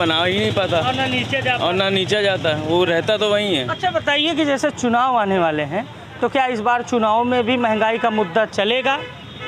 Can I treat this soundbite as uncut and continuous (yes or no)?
yes